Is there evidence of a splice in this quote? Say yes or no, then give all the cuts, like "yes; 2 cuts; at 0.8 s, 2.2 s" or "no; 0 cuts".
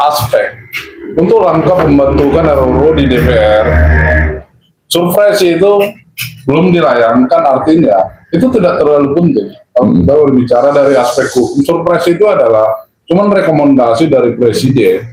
no; 0 cuts